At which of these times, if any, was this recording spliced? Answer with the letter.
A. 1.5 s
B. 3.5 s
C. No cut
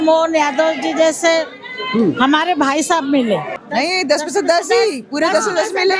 B